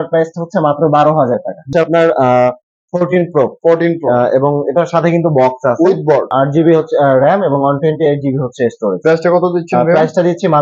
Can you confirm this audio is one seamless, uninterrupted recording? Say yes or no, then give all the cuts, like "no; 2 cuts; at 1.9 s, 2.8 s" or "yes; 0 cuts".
no; 2 cuts; at 1.7 s, 6.3 s